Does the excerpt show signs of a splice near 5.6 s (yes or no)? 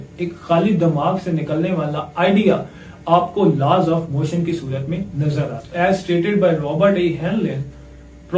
yes